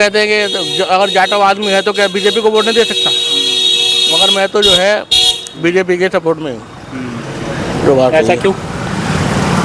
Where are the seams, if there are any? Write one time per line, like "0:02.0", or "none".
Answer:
none